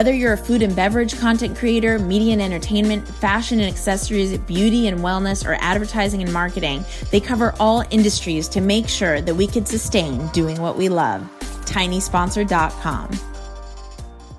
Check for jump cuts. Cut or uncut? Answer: uncut